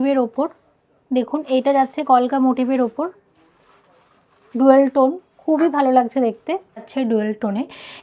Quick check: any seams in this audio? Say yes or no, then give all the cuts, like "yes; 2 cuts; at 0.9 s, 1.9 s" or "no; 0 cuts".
yes; 1 cut; at 6.9 s